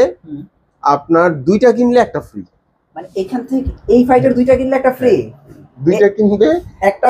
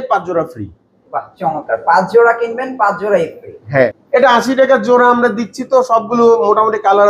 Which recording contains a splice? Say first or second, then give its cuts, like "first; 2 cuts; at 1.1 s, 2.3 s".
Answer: second; 1 cut; at 3.9 s